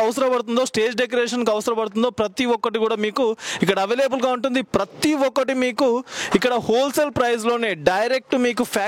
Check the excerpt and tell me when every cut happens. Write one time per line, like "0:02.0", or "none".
none

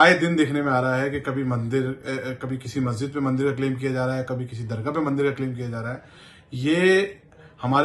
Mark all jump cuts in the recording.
none

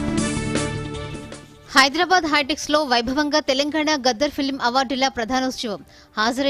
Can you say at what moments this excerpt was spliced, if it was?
0:01.0

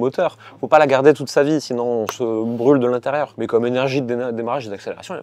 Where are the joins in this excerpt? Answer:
none

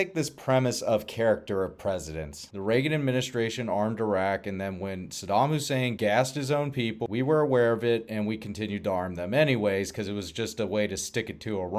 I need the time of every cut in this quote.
none

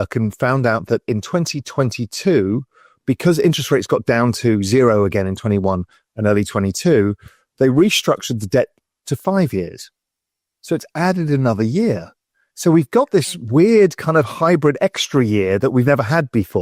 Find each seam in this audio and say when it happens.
none

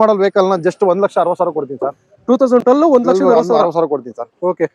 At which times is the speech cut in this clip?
none

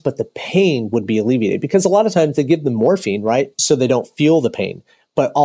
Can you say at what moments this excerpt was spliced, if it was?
0:03.5

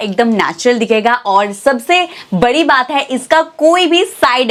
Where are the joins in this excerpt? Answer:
none

